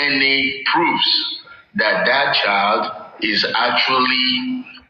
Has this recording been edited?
no; 0 cuts

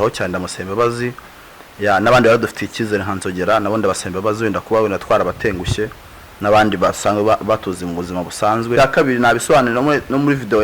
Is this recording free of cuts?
no; 1 cut; at 8.8 s

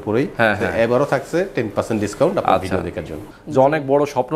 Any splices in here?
yes; 1 cut; at 3.1 s

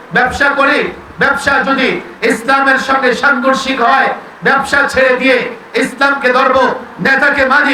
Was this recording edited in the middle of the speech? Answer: no; 0 cuts

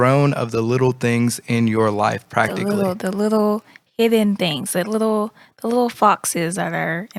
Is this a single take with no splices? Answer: yes; 0 cuts

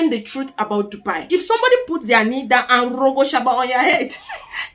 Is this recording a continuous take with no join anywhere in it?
no; 1 cut; at 1.2 s

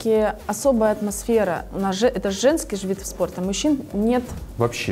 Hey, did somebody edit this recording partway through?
no; 0 cuts

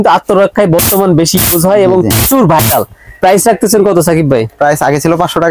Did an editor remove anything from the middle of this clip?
no; 0 cuts

